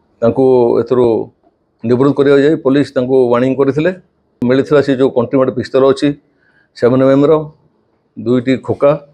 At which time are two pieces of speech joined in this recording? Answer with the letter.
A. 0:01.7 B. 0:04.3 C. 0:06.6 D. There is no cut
B